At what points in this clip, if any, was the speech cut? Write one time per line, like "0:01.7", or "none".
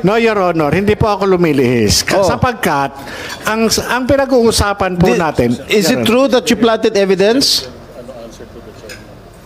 none